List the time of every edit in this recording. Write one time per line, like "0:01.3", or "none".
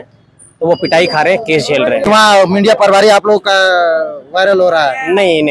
0:02.0